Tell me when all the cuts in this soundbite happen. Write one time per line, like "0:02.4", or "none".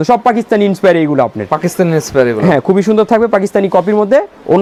none